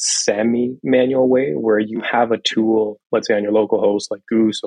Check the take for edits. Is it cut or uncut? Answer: uncut